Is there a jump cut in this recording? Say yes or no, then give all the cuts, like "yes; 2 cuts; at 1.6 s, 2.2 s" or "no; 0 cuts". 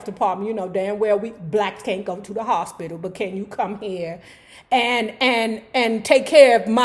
no; 0 cuts